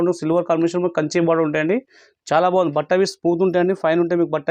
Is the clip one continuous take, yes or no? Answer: yes